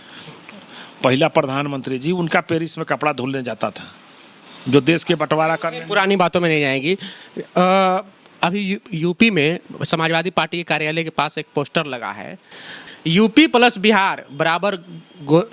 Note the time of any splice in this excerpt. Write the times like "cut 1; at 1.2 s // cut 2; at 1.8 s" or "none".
none